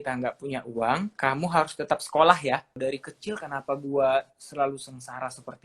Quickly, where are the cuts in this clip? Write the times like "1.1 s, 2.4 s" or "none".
1.1 s, 2.8 s